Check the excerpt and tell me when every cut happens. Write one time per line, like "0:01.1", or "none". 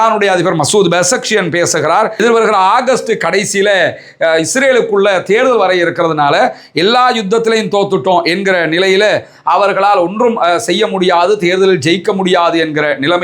0:02.2